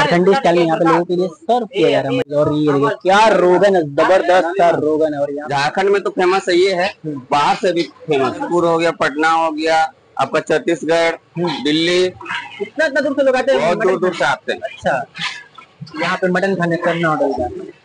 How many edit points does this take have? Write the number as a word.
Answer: three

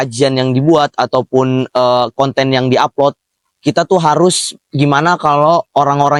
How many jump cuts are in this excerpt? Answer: zero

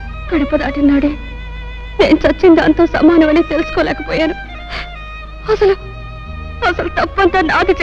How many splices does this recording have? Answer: zero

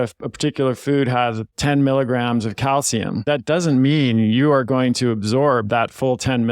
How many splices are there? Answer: two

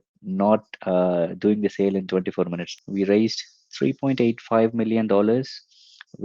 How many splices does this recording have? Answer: one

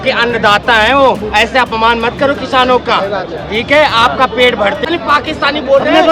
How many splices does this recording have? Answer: one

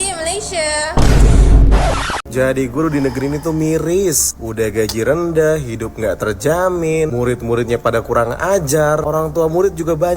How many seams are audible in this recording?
one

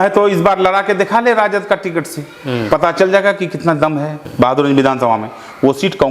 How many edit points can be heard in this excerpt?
one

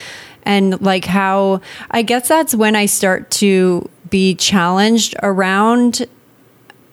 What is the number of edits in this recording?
zero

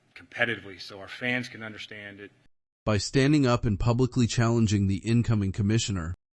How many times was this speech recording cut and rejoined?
zero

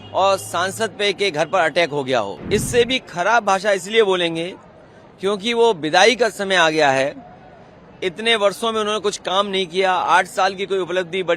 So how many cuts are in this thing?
one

